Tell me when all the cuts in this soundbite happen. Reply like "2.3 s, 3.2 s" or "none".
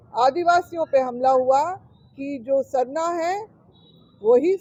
none